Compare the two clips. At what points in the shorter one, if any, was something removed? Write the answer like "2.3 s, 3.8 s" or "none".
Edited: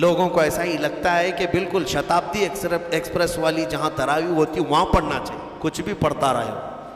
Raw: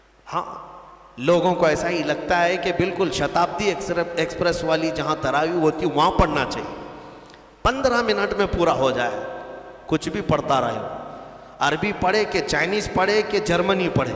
5.4 s